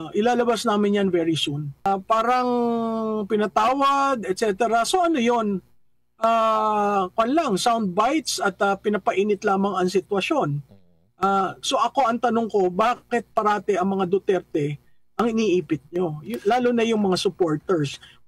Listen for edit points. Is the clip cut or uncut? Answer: cut